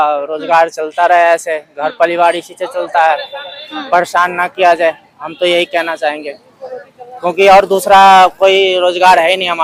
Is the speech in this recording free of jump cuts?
yes; 0 cuts

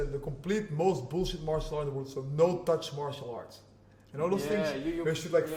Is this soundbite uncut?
yes; 0 cuts

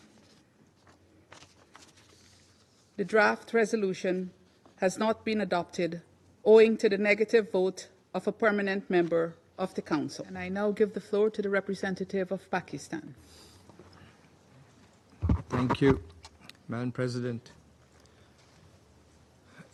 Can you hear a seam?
no; 0 cuts

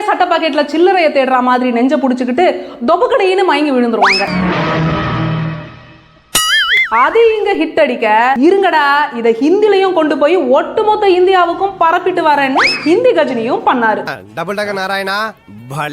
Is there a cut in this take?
yes; 1 cut; at 6.7 s

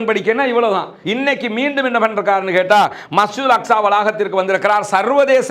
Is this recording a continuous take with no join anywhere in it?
no; 1 cut; at 1.0 s

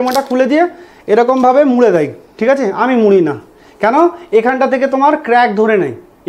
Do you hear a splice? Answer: no; 0 cuts

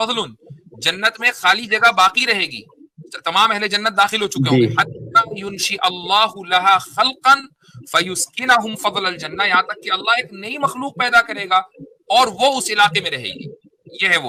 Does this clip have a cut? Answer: no; 0 cuts

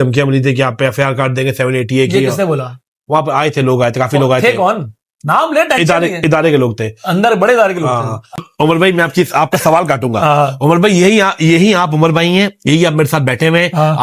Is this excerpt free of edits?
no; 1 cut; at 8.4 s

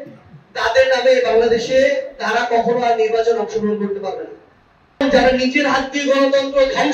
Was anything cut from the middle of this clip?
yes; 1 cut; at 5.0 s

